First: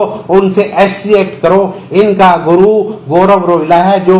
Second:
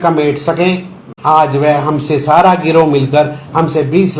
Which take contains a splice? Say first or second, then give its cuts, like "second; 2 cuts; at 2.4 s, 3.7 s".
second; 1 cut; at 1.0 s